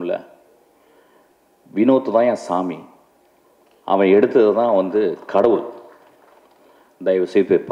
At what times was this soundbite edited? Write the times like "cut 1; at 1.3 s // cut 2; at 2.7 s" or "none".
none